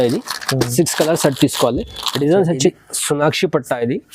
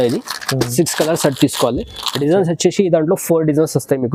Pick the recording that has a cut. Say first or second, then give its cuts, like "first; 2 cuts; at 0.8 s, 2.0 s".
first; 1 cut; at 2.7 s